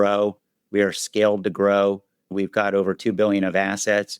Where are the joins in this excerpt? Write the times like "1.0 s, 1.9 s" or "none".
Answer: 2.3 s